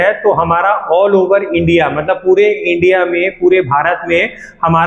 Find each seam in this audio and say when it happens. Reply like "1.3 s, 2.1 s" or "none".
none